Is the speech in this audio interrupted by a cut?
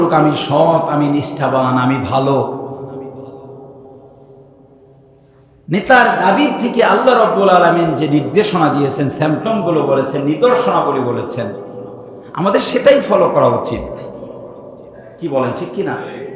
no; 0 cuts

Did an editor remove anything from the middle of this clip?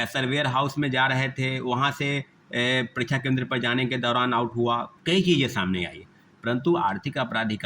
yes; 1 cut; at 4.9 s

